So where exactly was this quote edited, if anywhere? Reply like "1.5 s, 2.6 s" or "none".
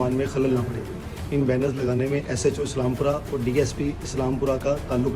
none